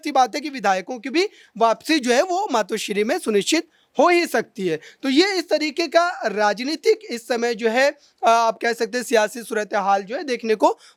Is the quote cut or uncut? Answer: uncut